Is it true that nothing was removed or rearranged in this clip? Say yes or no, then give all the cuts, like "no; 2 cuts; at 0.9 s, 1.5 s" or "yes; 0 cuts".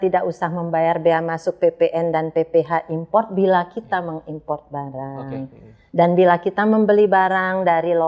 yes; 0 cuts